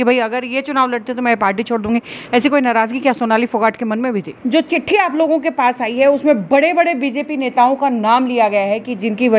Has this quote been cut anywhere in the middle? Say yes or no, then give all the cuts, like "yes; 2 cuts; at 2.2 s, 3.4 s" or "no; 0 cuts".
yes; 1 cut; at 4.3 s